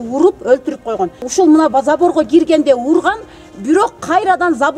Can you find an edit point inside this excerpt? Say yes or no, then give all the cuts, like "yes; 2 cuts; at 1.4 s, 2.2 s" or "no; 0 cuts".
yes; 1 cut; at 1.2 s